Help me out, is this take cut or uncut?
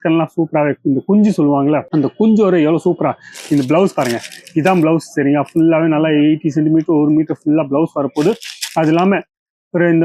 uncut